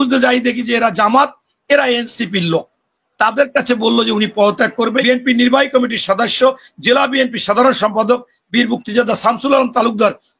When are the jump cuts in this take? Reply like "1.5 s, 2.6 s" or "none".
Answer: 5.0 s